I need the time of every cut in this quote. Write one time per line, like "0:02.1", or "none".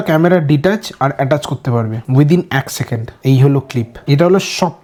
none

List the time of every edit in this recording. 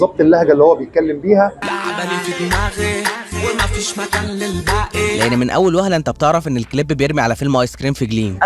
0:05.2

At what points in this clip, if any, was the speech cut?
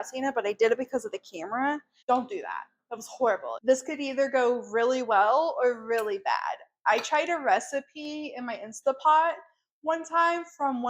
0:01.9
0:03.6

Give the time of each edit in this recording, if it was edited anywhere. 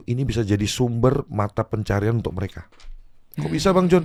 none

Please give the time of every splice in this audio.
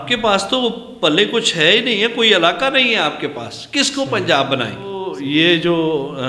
0:05.1

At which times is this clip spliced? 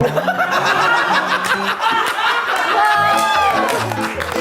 none

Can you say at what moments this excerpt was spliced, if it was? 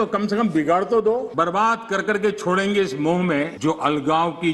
0:01.3
0:03.5

